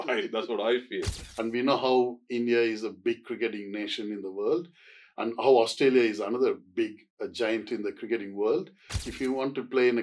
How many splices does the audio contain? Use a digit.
2